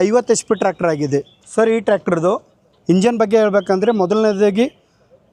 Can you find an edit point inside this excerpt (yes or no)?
no